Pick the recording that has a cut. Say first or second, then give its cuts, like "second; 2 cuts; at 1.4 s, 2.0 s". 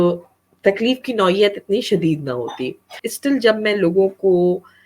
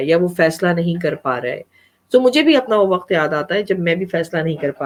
first; 1 cut; at 3.0 s